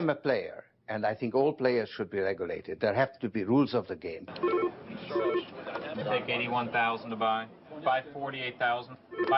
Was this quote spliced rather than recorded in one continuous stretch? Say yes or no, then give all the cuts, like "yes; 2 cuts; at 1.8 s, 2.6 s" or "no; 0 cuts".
no; 0 cuts